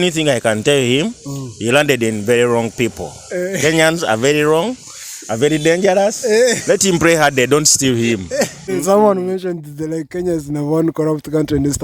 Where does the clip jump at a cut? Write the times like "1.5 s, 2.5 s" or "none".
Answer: 8.6 s

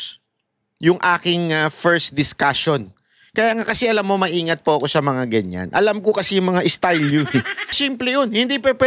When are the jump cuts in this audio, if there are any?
7.8 s

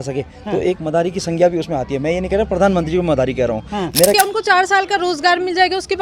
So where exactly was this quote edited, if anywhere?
4.1 s

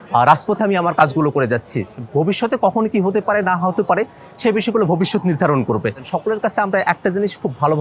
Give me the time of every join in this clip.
6.1 s

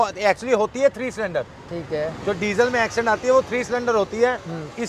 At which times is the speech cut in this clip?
none

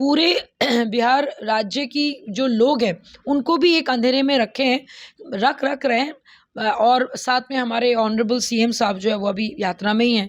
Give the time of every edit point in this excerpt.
none

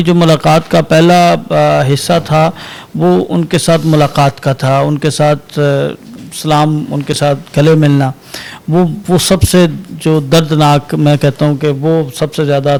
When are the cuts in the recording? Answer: none

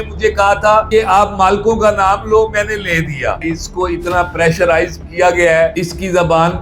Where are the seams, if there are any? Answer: 3.4 s, 5.7 s

